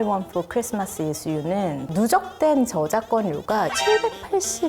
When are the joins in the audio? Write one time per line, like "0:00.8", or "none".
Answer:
0:01.8
0:03.7